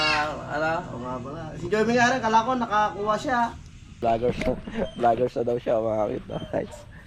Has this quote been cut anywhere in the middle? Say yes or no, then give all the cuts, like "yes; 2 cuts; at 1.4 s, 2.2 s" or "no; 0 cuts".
yes; 1 cut; at 4.1 s